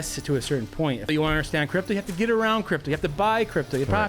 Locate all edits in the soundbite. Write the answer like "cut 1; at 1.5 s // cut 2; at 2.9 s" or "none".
cut 1; at 1.0 s